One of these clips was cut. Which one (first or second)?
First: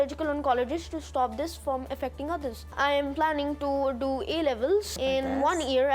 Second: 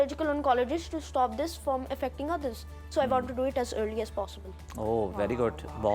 first